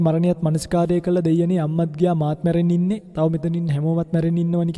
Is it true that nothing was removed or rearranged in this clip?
yes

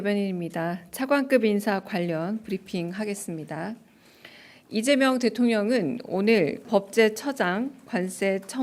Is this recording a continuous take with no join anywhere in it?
no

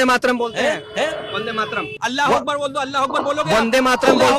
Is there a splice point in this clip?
yes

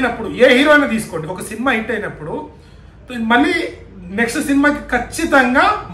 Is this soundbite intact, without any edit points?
yes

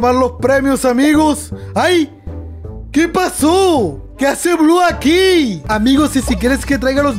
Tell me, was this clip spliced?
yes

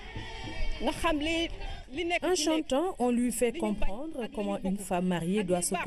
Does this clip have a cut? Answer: no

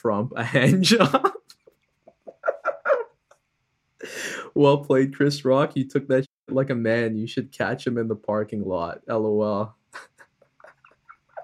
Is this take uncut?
yes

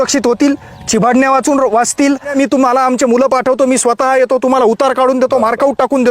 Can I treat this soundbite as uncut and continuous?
no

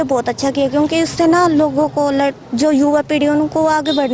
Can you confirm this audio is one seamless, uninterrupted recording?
yes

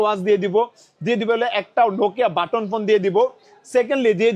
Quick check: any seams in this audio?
no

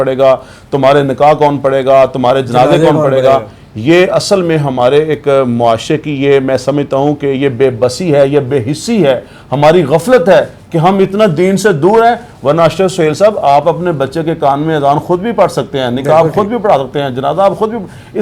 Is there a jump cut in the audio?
no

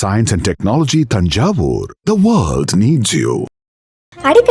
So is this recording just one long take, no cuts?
yes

